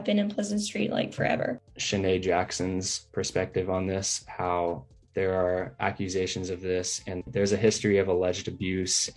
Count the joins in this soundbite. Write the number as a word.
one